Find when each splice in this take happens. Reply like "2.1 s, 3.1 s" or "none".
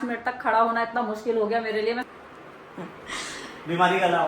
2.0 s